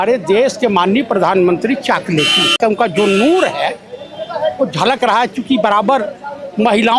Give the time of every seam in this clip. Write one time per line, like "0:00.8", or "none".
0:02.6